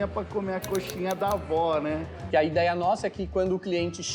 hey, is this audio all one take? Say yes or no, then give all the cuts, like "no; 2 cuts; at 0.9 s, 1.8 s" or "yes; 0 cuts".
no; 1 cut; at 2.1 s